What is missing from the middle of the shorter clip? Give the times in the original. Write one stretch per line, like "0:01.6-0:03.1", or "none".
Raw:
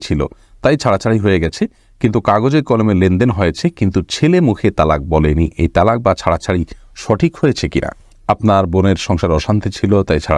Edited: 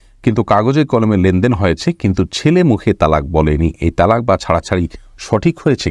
none

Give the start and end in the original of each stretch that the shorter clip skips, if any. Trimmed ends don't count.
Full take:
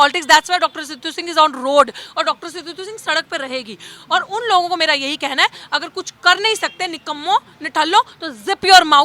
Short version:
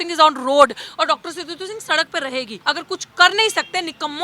0:03.7-0:05.6

